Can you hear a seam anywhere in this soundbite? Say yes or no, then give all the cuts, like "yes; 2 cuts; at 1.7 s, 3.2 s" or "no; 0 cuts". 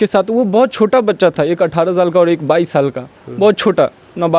no; 0 cuts